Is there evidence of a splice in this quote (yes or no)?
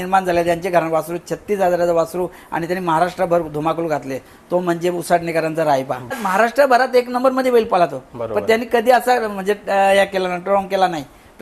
yes